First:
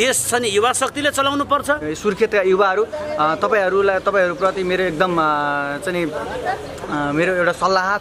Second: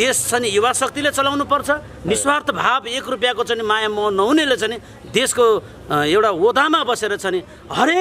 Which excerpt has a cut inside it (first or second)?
first